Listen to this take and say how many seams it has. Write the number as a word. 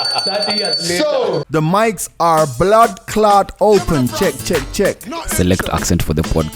one